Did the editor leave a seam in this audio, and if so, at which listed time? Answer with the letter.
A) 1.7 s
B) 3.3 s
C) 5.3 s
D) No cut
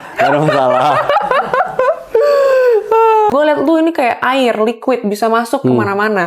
B